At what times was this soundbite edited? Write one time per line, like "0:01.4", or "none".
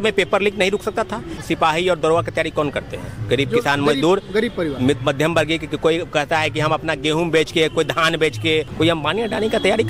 0:01.4
0:08.7